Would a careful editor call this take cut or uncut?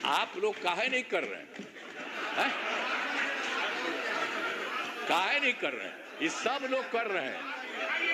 uncut